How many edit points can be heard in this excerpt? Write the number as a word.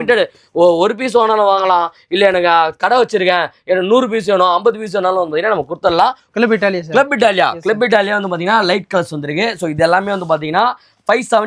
one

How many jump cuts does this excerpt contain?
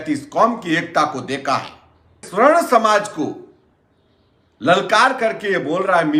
one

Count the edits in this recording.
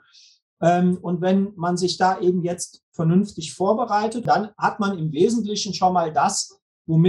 one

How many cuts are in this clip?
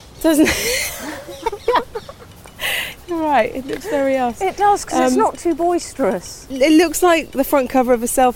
one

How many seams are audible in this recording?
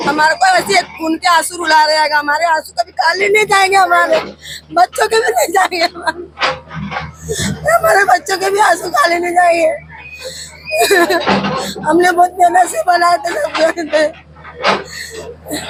zero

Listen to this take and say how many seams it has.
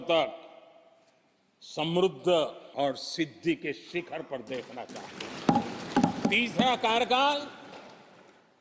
two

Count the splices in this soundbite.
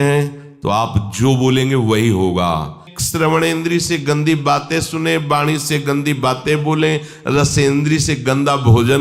one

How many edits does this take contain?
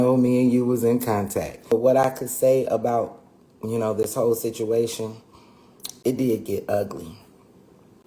one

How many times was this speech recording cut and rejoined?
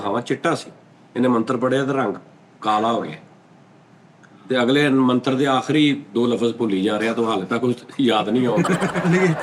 zero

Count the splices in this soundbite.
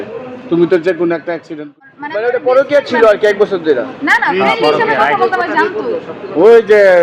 one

